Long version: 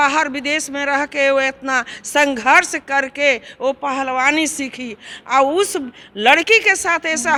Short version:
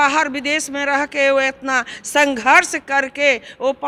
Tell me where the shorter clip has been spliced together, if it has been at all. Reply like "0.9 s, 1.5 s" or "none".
none